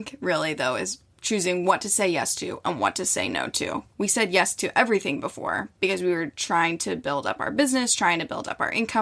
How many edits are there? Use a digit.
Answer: 1